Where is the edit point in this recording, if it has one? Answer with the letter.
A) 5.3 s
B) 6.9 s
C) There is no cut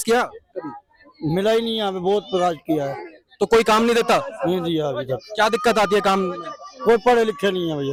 C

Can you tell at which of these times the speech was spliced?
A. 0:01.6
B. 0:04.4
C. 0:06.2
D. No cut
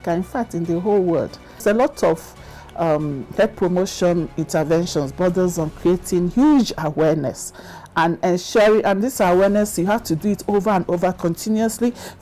A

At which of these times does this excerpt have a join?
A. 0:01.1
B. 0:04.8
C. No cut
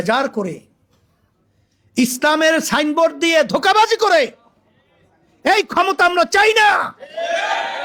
C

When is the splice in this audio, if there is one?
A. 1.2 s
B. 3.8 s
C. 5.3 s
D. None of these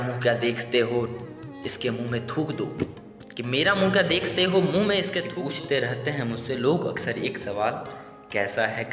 C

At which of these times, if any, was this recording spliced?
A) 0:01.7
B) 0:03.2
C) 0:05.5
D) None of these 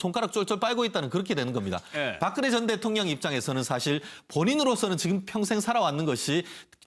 C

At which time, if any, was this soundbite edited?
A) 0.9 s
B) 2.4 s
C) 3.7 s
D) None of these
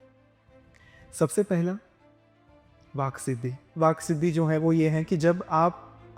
C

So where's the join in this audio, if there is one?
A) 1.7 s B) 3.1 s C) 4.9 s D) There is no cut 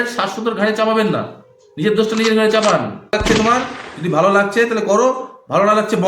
B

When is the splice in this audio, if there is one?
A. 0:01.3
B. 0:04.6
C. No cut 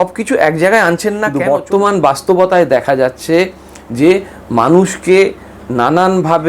A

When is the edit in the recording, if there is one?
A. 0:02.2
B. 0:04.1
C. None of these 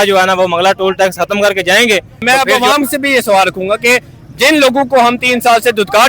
A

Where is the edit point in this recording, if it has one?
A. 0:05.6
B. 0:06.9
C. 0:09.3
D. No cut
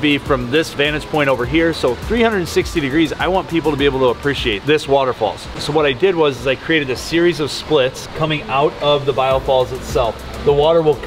A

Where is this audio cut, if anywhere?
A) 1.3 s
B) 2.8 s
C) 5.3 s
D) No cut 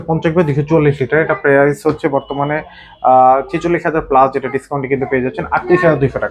D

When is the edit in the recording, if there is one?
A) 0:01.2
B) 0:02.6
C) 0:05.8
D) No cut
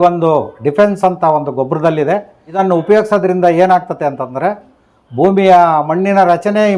B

